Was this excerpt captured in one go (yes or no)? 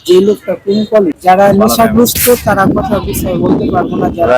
no